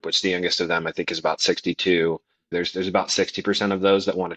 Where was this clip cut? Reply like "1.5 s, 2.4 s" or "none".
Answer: 2.5 s